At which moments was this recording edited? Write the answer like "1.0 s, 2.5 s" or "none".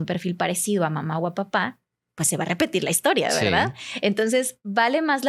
none